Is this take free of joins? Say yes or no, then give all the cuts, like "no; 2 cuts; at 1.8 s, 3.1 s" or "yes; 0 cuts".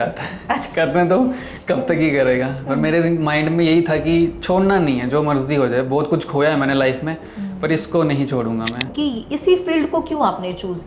no; 1 cut; at 8.9 s